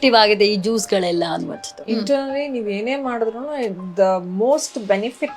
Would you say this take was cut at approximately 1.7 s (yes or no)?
yes